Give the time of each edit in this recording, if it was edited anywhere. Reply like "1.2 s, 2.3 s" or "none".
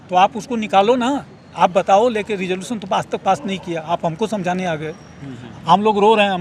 none